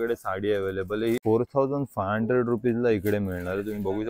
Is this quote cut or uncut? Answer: cut